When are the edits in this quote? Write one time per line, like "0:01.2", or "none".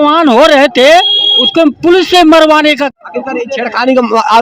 0:02.9